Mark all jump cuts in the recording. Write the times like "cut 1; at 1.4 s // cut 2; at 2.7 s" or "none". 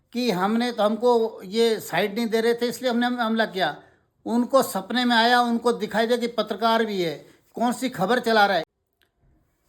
cut 1; at 8.7 s